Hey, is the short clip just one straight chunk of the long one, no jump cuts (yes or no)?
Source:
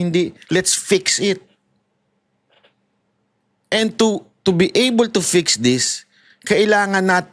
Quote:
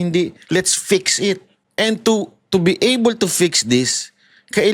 no